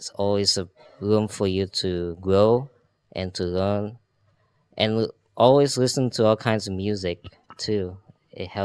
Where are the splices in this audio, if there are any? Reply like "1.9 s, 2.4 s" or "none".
none